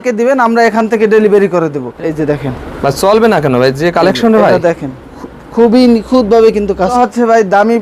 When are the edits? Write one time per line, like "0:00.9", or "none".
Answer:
0:01.8
0:06.9